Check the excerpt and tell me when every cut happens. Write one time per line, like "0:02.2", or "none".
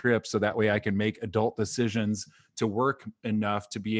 none